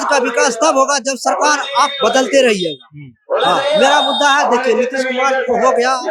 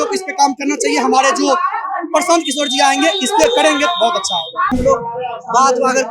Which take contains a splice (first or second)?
second